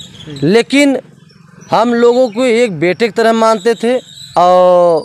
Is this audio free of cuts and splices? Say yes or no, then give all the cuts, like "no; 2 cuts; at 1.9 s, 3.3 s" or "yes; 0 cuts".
no; 1 cut; at 4.1 s